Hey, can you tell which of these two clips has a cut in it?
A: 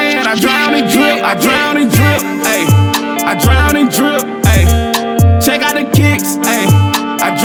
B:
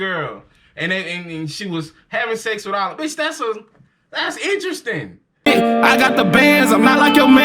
B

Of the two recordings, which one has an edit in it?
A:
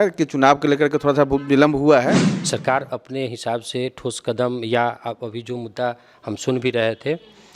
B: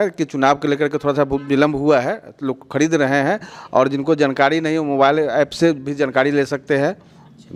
A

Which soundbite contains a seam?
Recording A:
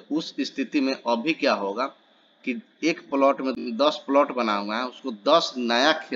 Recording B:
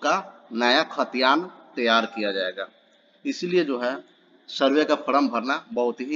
A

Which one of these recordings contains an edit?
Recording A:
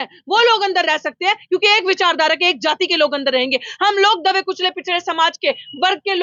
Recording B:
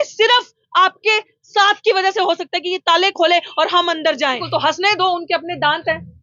B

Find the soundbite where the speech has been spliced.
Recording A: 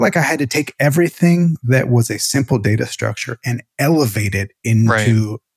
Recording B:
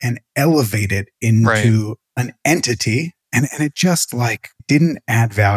B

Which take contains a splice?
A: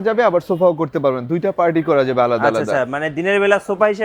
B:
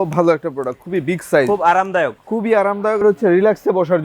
B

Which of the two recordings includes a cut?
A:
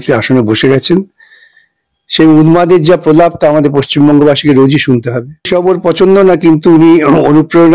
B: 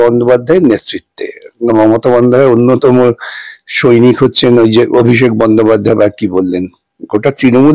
A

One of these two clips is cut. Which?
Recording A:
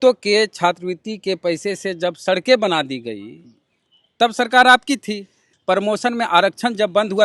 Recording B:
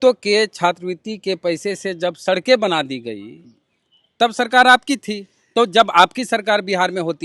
A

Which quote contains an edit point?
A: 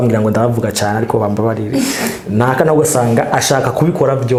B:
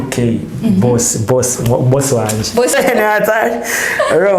B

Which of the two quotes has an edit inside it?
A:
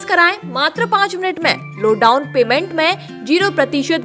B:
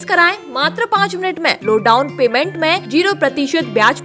B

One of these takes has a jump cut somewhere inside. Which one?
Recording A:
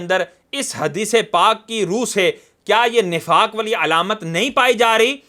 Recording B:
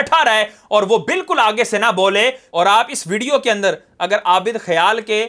B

